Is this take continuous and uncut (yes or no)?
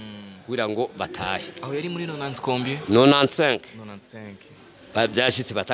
yes